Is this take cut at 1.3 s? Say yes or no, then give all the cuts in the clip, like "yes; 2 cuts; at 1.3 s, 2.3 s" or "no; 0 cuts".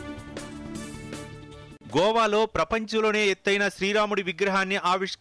yes; 1 cut; at 1.3 s